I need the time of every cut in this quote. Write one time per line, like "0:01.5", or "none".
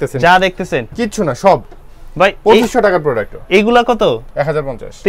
none